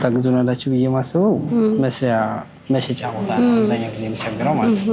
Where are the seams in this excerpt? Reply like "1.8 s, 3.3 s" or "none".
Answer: none